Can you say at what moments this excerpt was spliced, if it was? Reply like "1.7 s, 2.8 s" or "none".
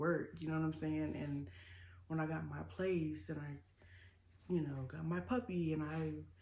none